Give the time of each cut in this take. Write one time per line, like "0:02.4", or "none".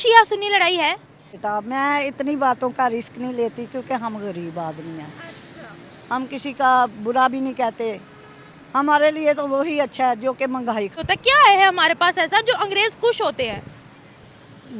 0:01.4
0:11.0